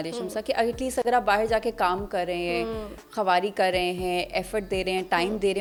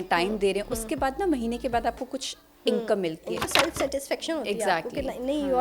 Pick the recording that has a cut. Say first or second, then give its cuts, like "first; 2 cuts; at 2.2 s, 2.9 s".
second; 1 cut; at 3.5 s